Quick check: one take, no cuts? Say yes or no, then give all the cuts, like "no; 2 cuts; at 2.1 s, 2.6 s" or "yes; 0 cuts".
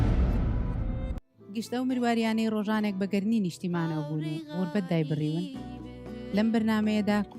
no; 1 cut; at 1.0 s